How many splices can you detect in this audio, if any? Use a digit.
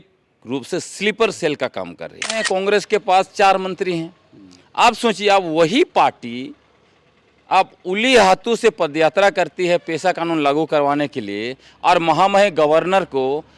1